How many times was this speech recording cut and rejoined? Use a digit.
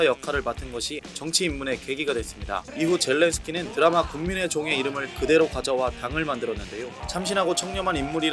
4